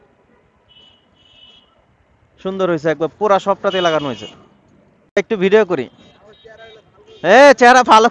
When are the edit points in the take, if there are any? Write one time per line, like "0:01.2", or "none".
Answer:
0:05.2